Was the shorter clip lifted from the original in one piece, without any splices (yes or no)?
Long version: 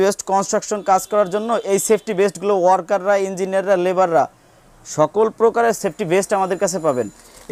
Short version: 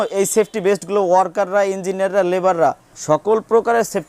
no